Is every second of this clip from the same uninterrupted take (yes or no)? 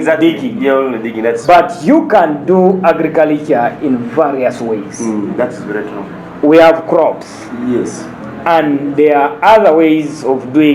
yes